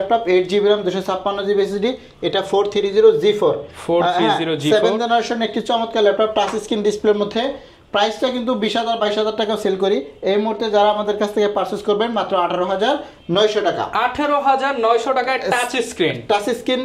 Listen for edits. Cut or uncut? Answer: uncut